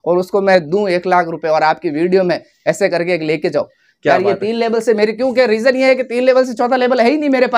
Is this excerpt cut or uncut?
uncut